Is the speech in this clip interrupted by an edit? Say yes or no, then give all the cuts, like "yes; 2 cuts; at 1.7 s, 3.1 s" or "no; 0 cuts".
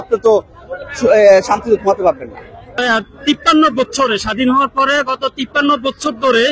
yes; 1 cut; at 2.8 s